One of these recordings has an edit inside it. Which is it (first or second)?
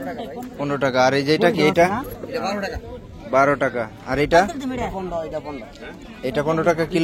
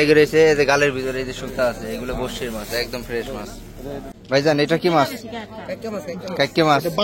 second